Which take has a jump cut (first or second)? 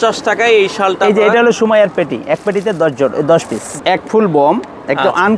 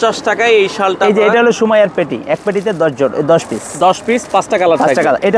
first